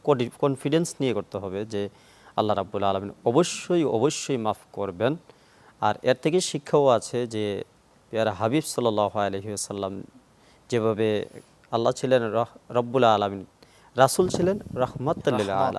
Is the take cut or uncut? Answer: uncut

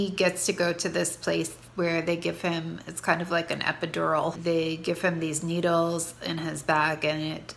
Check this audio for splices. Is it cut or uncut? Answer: cut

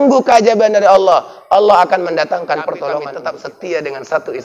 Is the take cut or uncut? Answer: cut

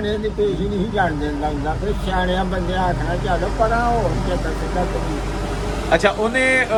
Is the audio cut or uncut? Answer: uncut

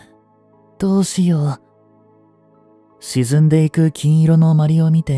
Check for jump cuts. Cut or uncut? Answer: uncut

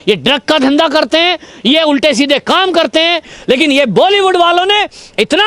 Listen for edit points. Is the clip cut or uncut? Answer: cut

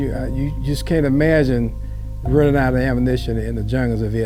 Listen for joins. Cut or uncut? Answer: uncut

